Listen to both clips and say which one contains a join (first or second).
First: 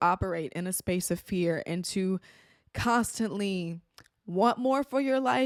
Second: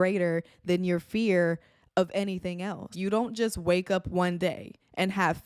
second